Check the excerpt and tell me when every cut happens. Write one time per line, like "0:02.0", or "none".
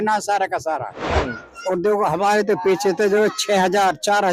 0:01.0